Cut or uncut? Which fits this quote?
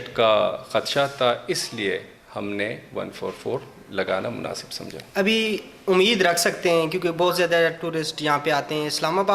uncut